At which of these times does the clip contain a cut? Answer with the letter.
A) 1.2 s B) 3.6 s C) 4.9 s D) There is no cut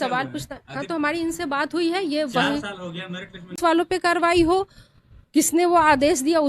B